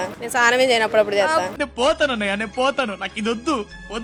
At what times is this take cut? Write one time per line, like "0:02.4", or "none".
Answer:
none